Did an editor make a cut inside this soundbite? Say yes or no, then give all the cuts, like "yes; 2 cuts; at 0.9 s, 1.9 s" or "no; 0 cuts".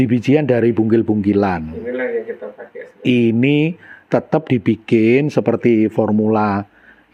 no; 0 cuts